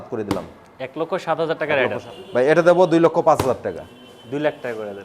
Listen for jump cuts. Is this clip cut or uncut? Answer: cut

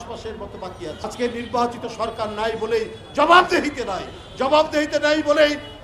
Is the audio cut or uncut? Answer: cut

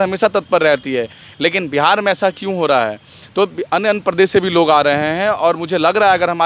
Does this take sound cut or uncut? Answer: uncut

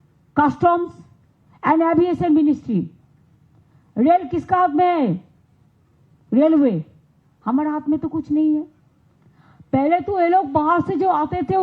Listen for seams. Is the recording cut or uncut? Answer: uncut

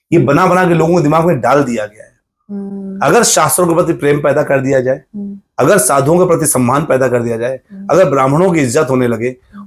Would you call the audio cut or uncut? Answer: uncut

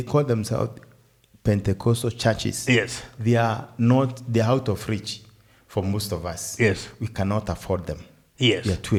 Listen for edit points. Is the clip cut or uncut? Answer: uncut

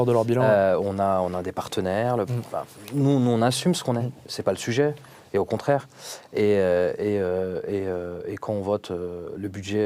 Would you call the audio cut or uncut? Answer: uncut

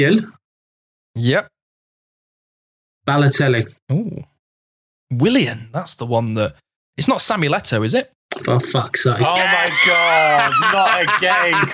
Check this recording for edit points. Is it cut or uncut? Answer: uncut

